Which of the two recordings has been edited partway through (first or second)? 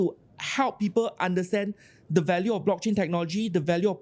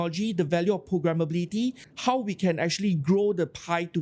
second